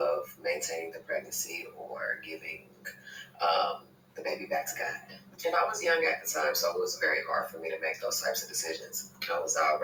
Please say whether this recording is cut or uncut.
uncut